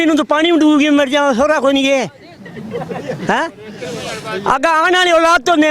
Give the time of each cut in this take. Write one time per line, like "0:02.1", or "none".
none